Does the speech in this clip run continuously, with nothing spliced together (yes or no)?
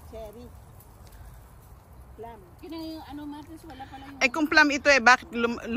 yes